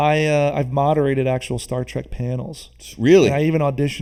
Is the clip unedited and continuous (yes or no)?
yes